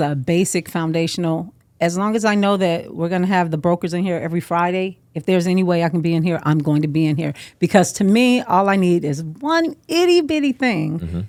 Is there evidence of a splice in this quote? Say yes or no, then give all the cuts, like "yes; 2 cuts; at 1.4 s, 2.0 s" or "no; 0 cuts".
no; 0 cuts